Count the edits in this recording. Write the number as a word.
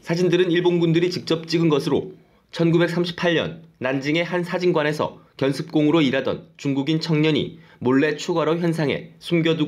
one